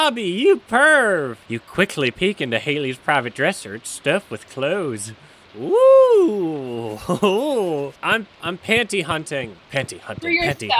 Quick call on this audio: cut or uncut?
uncut